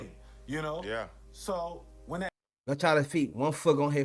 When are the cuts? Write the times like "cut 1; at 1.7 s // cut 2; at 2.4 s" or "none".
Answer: cut 1; at 2.3 s